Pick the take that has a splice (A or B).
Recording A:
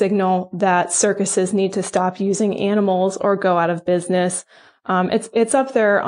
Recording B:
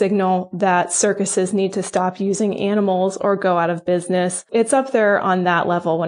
B